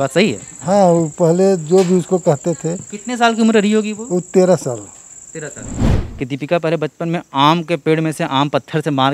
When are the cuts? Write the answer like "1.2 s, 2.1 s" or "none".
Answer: 5.9 s